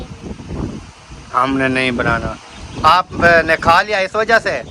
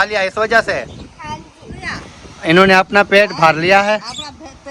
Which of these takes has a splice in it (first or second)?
second